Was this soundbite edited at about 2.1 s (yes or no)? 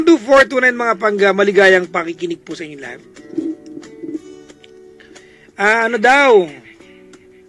yes